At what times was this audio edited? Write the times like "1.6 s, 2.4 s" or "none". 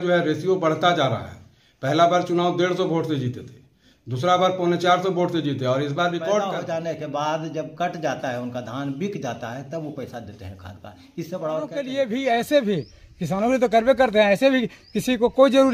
6.5 s, 11.8 s